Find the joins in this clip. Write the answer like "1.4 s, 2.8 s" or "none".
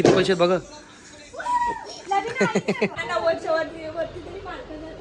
3.0 s

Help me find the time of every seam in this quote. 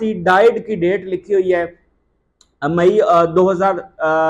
none

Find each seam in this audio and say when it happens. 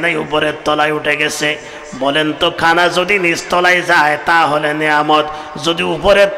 none

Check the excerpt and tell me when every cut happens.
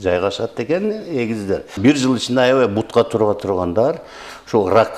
1.7 s

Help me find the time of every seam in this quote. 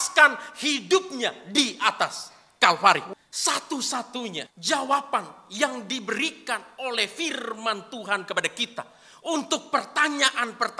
3.1 s, 4.5 s

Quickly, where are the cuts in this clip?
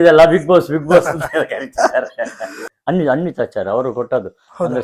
2.7 s

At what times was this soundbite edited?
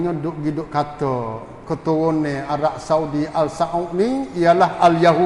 none

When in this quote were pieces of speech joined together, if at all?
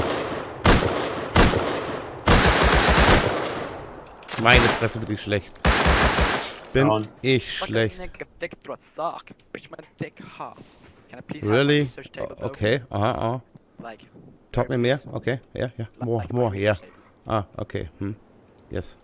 none

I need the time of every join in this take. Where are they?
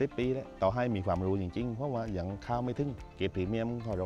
3.0 s

